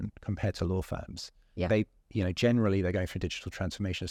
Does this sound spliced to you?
no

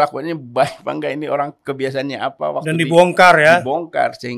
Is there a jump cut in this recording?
no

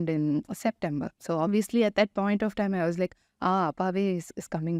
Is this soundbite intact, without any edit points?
yes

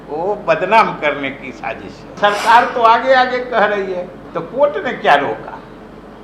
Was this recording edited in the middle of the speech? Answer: yes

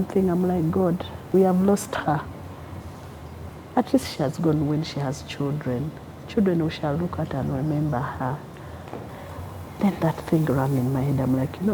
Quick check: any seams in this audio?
yes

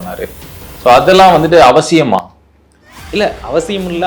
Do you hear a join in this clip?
no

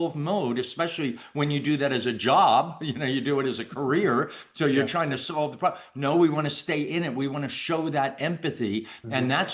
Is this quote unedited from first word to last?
yes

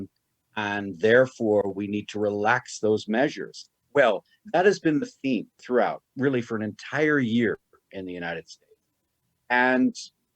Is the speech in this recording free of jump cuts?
no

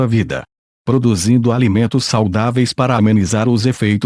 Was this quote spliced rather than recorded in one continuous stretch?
no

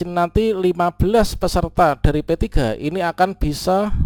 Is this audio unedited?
yes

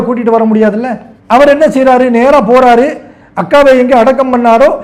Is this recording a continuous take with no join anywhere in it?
yes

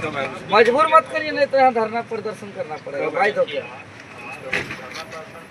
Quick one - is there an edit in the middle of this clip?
no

